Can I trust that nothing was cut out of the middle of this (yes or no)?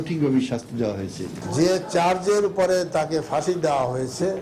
no